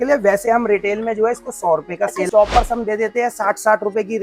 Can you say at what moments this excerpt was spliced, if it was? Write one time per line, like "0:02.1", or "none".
0:02.3